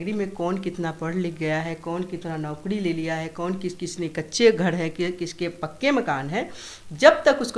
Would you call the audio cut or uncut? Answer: uncut